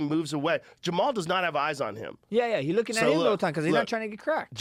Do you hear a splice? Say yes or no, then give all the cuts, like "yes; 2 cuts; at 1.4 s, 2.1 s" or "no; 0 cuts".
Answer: no; 0 cuts